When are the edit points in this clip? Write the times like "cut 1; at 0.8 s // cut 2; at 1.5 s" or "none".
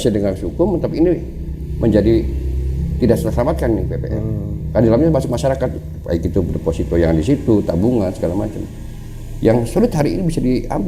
none

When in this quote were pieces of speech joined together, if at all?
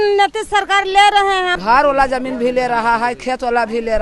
cut 1; at 1.6 s

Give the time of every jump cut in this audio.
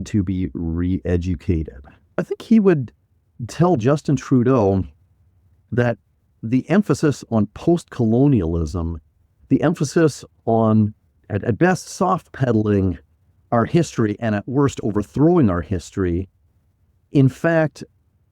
cut 1; at 2.2 s // cut 2; at 7.3 s // cut 3; at 14.2 s

